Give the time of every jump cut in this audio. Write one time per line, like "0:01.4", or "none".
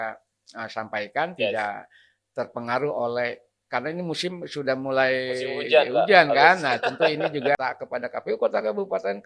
0:07.6